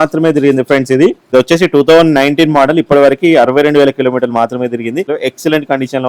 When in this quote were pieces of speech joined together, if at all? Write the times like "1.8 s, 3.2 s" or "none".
1.3 s, 5.1 s